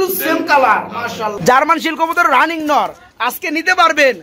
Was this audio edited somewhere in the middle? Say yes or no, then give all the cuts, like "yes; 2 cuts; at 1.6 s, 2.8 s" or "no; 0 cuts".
yes; 1 cut; at 1.4 s